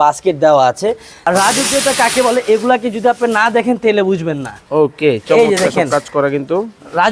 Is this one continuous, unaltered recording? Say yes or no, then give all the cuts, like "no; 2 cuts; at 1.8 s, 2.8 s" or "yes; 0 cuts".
no; 1 cut; at 1.1 s